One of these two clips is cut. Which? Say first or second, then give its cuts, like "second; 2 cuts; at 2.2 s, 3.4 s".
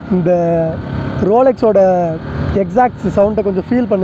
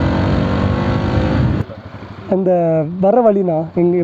second; 1 cut; at 1.6 s